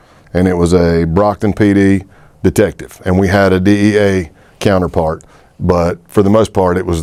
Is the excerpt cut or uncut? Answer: uncut